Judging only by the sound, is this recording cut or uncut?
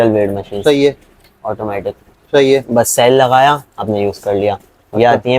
uncut